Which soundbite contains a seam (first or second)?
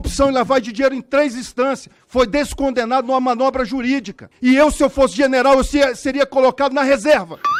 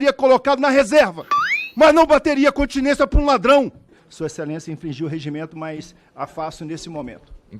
second